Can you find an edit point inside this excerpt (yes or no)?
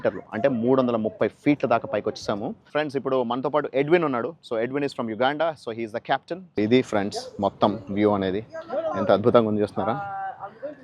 yes